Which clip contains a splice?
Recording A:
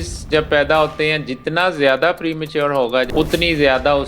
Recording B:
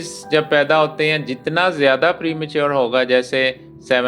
A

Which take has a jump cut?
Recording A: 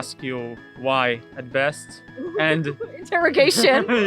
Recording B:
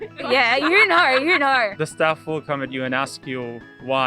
B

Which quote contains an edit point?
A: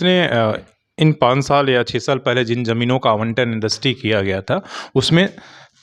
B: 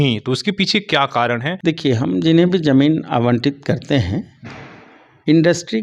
B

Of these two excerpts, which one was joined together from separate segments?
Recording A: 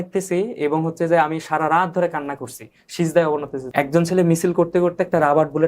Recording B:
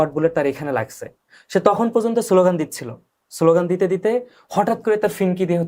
A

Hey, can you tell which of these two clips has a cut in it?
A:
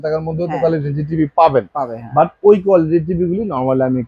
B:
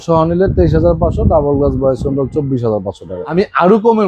B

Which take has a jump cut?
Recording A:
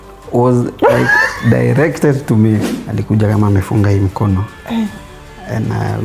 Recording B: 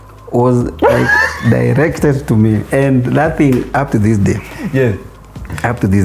A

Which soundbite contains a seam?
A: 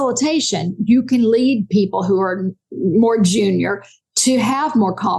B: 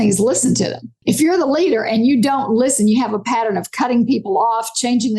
B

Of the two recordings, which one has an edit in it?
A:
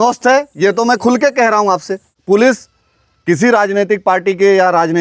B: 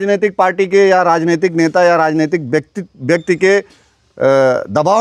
A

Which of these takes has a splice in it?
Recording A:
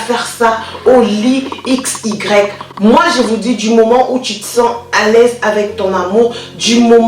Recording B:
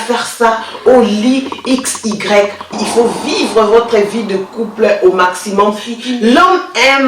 B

